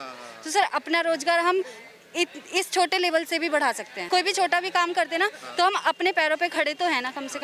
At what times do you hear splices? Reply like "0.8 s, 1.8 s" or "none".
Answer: 4.0 s